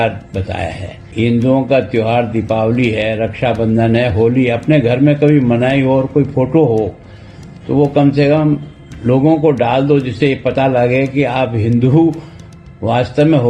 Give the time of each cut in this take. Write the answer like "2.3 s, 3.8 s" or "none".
1.0 s